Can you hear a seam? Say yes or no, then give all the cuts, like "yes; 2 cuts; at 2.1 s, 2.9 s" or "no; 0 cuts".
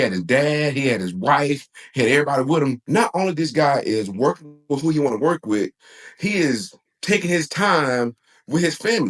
yes; 1 cut; at 2.8 s